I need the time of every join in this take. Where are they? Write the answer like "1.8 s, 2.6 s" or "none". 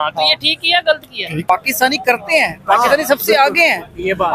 1.4 s